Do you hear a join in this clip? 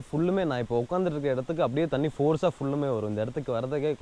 no; 0 cuts

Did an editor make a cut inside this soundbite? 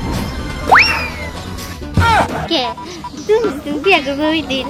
yes; 1 cut; at 2.4 s

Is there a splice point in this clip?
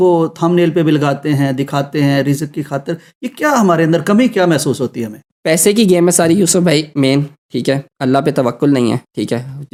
no; 0 cuts

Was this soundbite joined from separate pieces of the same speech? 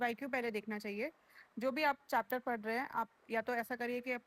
no; 0 cuts

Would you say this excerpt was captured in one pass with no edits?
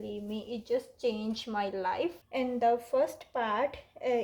no; 1 cut; at 2.2 s

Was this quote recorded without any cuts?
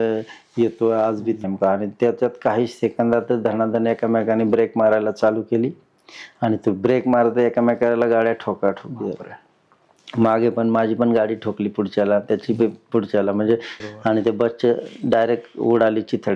no; 2 cuts; at 1.4 s, 13.7 s

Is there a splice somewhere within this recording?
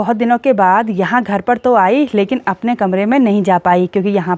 no; 0 cuts

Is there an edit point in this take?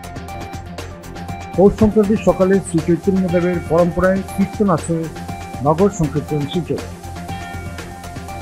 yes; 1 cut; at 1.6 s

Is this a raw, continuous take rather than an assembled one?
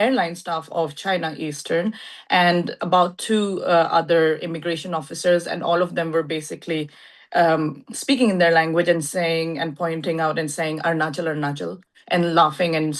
yes; 0 cuts

